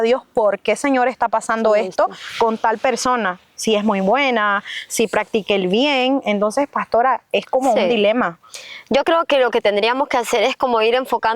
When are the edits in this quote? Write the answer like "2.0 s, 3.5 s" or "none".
none